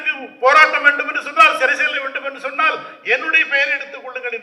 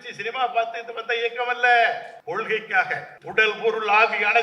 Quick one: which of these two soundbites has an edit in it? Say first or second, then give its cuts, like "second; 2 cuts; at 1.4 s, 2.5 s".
second; 2 cuts; at 2.1 s, 3.2 s